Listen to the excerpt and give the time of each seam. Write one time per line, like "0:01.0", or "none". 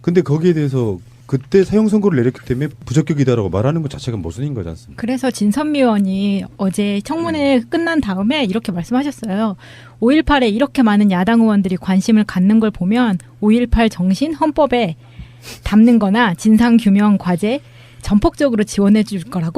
0:03.9